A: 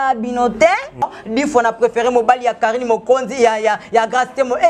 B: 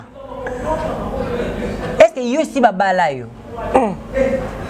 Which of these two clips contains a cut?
A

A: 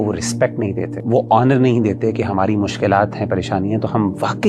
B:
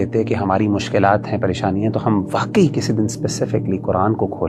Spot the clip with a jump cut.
A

